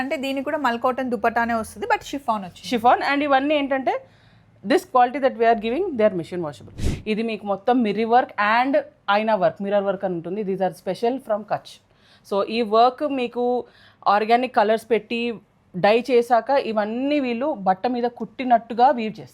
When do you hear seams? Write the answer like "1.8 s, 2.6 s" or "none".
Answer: 6.8 s